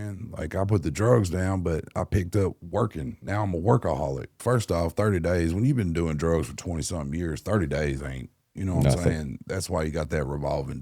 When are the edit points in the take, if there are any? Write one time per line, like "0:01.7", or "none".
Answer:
0:04.4